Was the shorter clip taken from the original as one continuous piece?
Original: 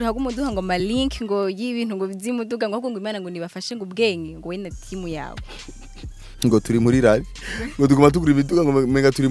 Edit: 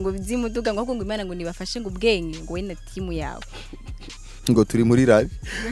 yes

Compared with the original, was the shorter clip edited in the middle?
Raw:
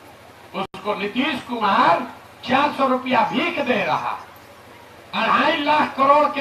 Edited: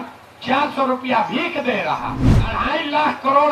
yes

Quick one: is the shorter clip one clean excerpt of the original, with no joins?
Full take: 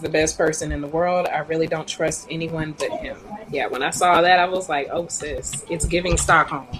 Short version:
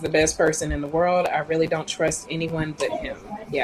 yes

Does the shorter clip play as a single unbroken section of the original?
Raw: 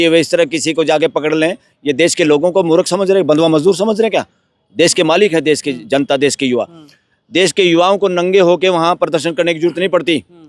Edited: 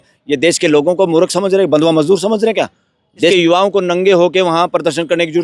no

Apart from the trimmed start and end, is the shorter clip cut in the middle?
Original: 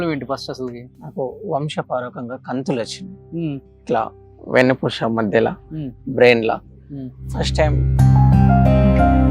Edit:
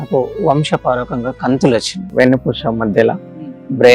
yes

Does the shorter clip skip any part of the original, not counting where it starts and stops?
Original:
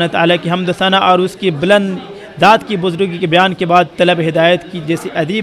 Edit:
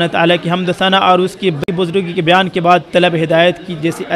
yes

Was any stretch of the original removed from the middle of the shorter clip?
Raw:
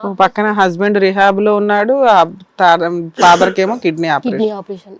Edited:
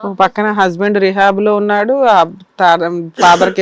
no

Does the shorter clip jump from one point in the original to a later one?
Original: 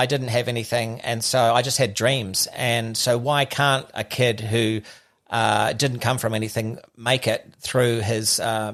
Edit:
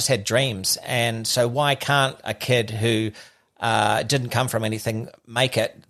no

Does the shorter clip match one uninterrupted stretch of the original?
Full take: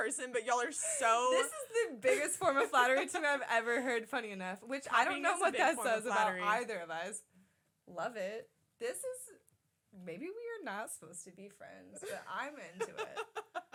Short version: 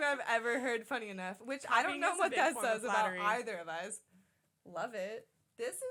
yes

